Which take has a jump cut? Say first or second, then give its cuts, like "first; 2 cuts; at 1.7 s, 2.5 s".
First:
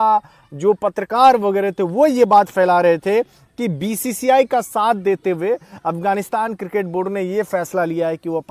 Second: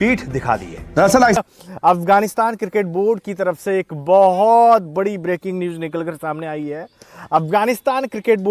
second; 1 cut; at 1.4 s